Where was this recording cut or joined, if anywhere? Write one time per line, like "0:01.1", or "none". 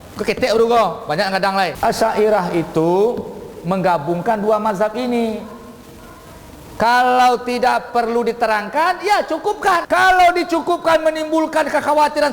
0:01.7
0:09.8